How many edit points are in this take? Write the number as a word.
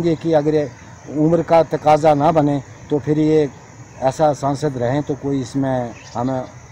zero